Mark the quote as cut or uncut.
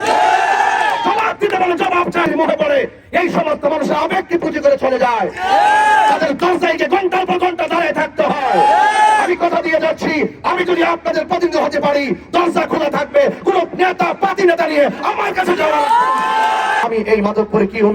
cut